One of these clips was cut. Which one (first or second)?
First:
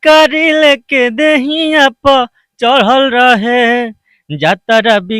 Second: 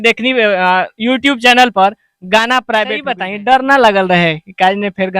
second